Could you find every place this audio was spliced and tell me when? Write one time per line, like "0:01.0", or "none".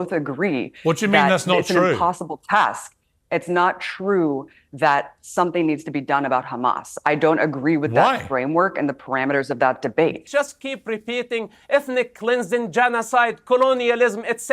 0:10.2